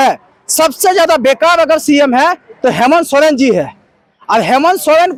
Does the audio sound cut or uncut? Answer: uncut